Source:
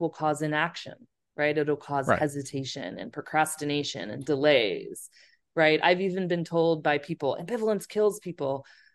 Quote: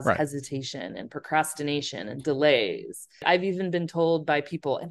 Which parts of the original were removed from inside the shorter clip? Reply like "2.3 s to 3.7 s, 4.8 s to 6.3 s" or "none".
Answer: 5.2 s to 5.8 s